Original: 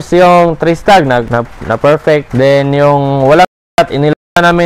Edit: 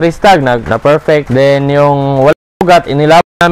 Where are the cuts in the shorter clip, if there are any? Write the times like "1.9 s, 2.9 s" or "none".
1.2 s